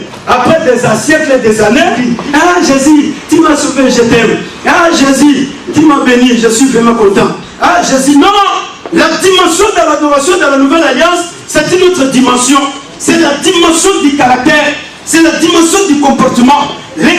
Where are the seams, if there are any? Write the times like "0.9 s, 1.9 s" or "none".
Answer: 2.1 s